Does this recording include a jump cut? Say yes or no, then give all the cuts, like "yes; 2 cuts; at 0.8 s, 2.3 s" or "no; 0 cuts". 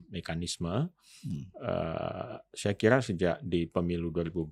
no; 0 cuts